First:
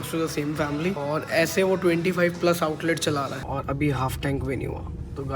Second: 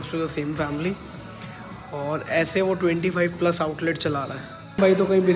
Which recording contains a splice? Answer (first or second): first